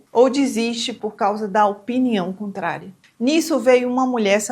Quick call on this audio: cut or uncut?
uncut